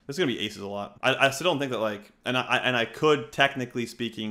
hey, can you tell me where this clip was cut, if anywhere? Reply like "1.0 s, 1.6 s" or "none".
0.9 s